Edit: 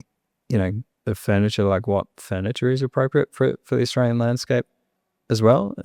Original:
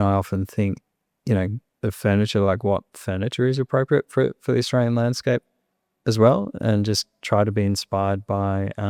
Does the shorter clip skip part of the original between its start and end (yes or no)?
no